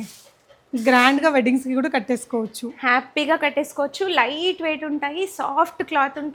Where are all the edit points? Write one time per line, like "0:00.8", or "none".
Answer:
none